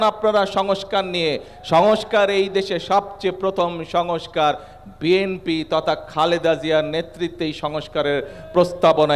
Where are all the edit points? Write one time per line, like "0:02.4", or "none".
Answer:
none